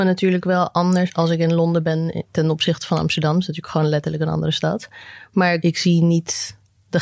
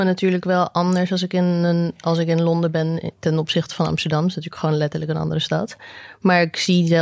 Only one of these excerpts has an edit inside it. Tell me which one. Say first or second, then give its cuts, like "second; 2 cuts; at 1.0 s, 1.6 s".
first; 2 cuts; at 1.1 s, 5.6 s